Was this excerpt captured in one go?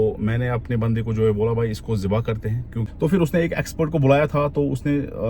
no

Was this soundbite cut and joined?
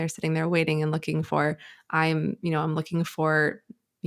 no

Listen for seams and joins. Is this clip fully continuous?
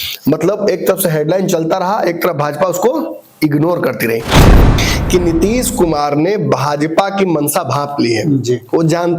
no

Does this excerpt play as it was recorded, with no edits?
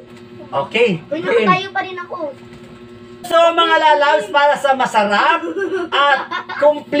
no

